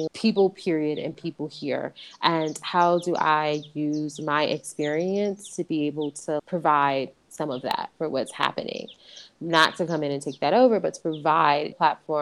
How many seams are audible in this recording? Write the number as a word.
zero